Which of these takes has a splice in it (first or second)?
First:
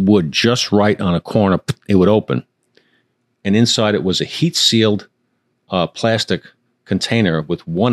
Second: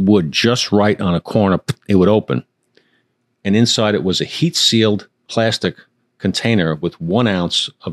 second